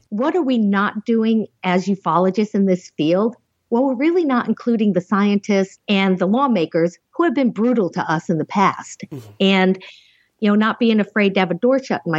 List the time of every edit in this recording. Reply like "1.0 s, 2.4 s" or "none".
5.8 s